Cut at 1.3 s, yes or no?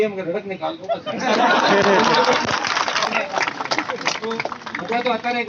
no